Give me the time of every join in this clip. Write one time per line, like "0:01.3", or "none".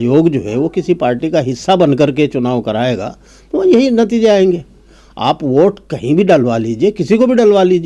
none